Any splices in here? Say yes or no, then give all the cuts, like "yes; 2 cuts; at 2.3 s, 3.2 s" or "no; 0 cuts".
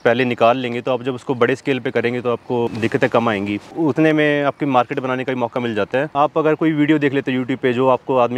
yes; 3 cuts; at 2.7 s, 3.7 s, 6.1 s